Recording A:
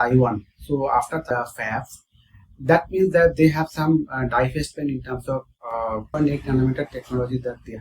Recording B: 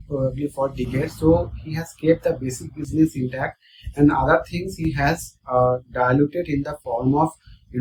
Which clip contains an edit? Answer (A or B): A